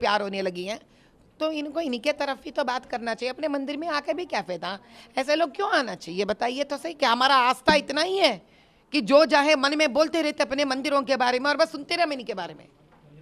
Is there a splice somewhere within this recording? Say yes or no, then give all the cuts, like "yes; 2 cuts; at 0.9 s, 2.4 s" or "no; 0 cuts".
no; 0 cuts